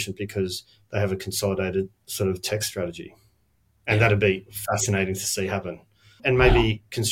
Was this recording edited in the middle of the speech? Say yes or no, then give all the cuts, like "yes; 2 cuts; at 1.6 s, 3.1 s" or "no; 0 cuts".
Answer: yes; 1 cut; at 6.2 s